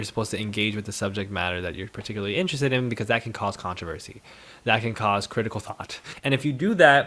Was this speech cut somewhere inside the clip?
yes; 1 cut; at 6.1 s

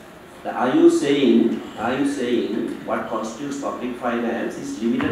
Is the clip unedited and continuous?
yes; 0 cuts

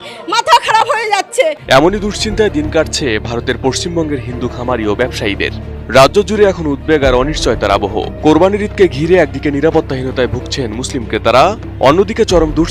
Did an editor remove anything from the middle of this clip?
yes; 1 cut; at 1.6 s

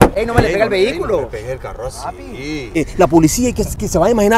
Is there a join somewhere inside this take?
yes; 1 cut; at 2.8 s

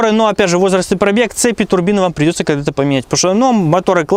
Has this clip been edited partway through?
no; 0 cuts

